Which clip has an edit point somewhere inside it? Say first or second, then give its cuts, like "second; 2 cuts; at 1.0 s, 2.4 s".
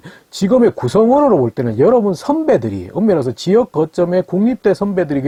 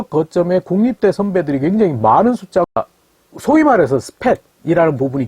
second; 1 cut; at 2.7 s